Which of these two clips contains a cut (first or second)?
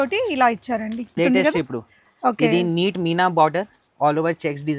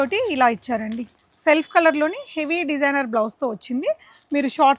first